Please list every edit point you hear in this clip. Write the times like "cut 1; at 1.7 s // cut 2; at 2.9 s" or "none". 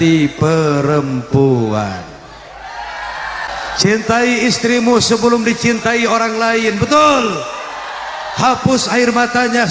cut 1; at 3.5 s